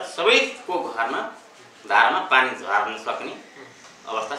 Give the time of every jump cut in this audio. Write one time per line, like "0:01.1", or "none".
none